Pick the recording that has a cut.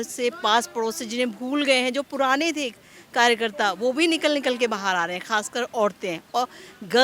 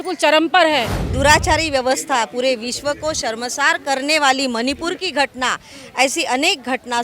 second; 1 cut; at 1.0 s

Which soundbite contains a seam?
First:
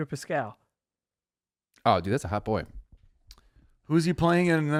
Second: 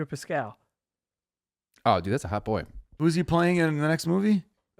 second; 1 cut; at 2.8 s

